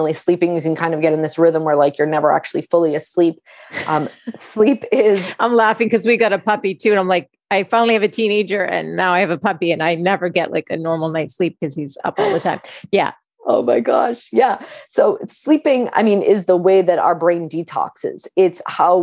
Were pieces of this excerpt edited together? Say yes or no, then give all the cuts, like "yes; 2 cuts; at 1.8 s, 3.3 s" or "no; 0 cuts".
no; 0 cuts